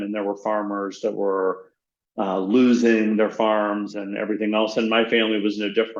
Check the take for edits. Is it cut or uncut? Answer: uncut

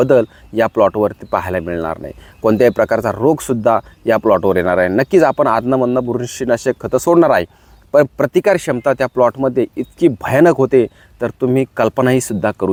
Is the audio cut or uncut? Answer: uncut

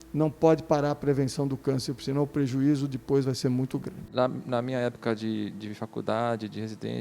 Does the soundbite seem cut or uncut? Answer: cut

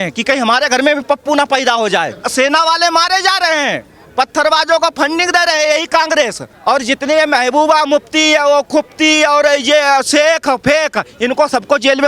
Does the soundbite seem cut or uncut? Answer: cut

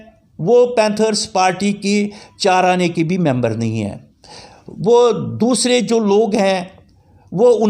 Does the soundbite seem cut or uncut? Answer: uncut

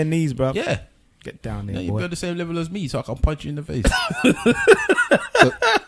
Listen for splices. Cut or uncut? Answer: uncut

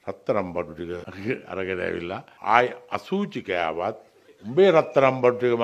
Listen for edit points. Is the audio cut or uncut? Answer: cut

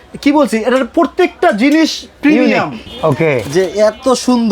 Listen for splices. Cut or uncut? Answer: cut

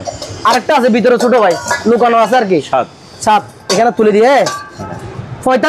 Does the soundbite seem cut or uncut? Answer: uncut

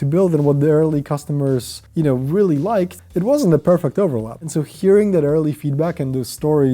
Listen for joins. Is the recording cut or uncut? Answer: cut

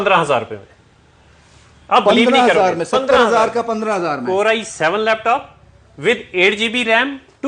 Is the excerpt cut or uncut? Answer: uncut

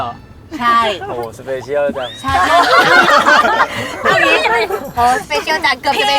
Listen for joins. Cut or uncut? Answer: uncut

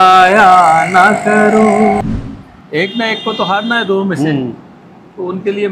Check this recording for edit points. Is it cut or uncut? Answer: cut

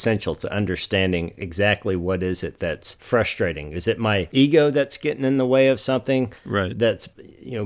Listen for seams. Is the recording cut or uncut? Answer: uncut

